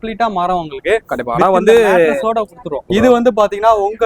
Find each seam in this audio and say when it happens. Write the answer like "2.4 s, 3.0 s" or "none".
2.9 s